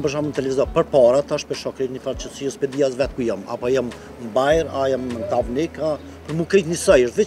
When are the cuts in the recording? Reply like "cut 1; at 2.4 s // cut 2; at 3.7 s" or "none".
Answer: none